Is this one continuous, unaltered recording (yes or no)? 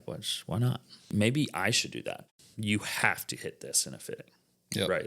no